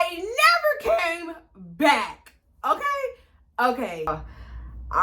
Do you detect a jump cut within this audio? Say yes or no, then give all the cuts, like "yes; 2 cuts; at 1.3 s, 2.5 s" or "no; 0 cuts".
yes; 1 cut; at 4.1 s